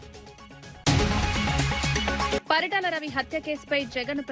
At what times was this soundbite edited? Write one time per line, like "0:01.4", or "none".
0:00.8
0:02.4